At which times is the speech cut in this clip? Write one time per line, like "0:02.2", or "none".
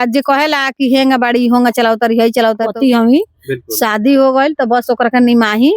0:02.7